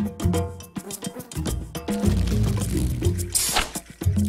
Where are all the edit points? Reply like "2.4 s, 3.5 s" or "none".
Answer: none

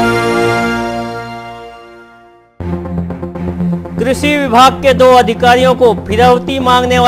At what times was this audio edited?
3.7 s

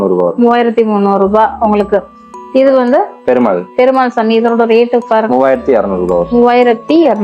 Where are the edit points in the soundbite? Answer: none

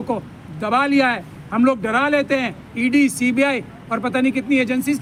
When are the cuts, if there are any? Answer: none

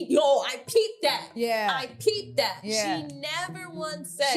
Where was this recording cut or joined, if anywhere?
none

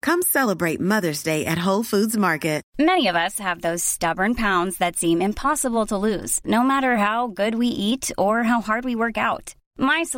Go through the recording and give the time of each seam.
2.7 s

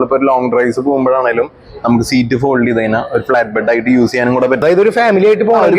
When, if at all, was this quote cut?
4.6 s

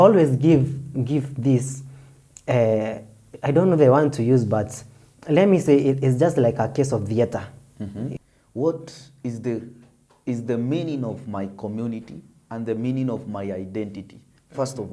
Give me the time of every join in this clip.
8.2 s

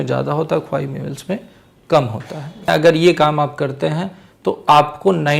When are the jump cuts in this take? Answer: 2.7 s

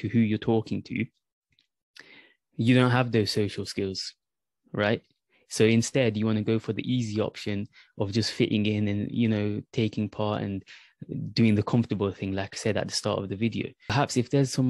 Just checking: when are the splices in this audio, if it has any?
13.8 s

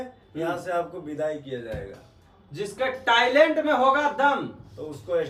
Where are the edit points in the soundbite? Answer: none

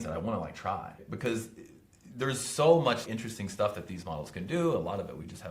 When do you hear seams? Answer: 1.0 s, 3.0 s

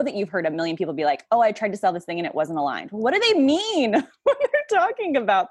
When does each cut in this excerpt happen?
none

